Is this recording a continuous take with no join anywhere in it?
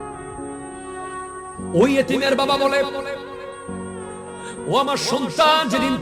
no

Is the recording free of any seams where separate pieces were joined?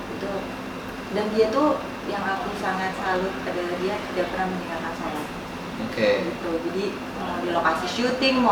yes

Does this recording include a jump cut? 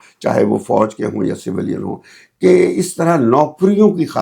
no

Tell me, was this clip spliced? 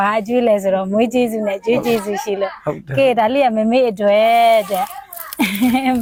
no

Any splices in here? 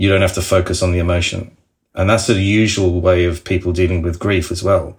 no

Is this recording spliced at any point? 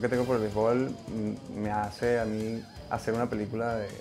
no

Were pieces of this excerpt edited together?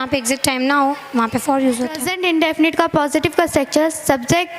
yes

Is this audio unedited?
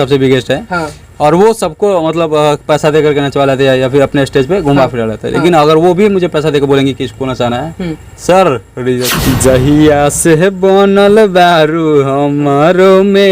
no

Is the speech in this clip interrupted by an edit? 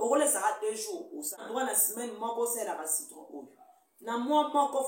yes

